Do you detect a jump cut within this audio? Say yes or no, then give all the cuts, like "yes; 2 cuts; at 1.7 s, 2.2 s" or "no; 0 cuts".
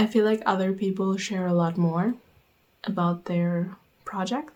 no; 0 cuts